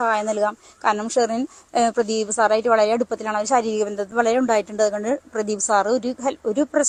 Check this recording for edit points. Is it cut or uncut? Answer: uncut